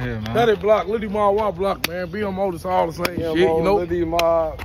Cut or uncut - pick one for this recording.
uncut